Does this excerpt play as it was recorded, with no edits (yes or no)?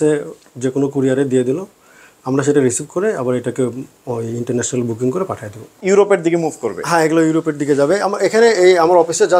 no